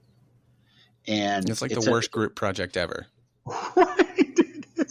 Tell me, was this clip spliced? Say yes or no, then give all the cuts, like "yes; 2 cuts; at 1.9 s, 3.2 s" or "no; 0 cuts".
no; 0 cuts